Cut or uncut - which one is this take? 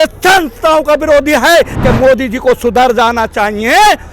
cut